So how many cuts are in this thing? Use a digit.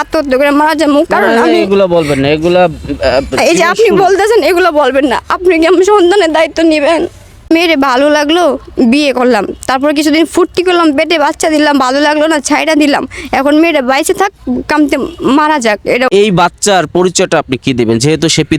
2